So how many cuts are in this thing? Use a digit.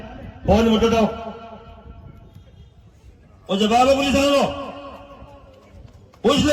0